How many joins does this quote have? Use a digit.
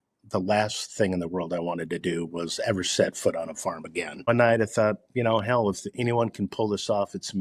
1